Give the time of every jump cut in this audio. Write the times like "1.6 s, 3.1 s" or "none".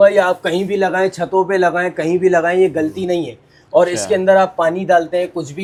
none

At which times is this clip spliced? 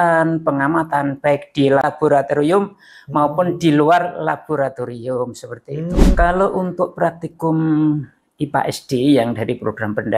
1.9 s, 6.2 s

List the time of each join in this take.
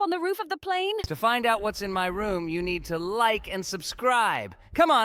1.1 s

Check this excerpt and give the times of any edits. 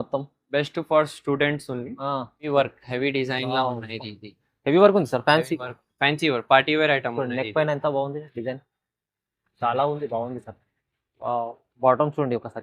2.5 s

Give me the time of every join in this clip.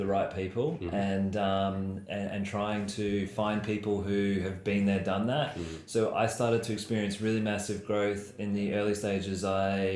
none

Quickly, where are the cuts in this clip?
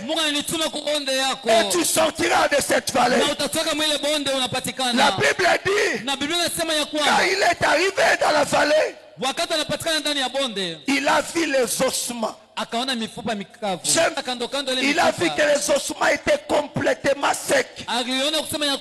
14.2 s

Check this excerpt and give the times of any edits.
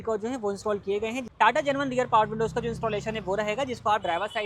1.2 s

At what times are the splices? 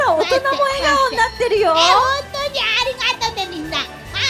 none

